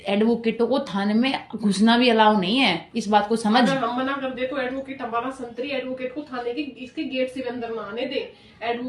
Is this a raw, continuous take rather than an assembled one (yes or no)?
yes